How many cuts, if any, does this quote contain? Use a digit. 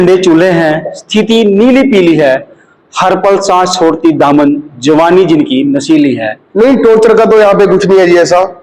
1